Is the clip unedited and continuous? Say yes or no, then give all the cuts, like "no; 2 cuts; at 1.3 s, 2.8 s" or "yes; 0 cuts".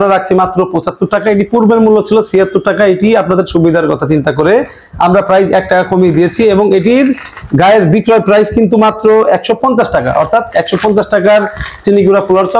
yes; 0 cuts